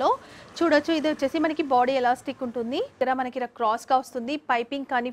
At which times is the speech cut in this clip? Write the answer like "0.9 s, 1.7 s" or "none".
3.0 s